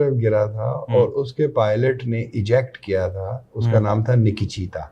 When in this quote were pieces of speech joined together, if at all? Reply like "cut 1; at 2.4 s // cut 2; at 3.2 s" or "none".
none